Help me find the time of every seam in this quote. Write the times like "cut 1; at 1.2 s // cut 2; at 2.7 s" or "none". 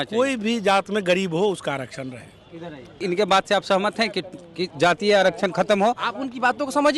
cut 1; at 3.0 s